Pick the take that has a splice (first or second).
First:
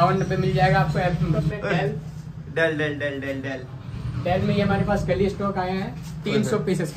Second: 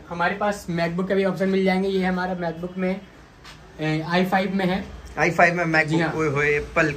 first